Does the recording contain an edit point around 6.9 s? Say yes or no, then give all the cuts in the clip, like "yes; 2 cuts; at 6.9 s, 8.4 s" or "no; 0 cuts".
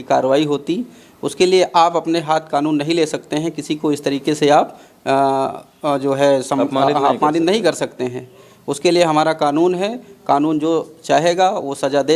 no; 0 cuts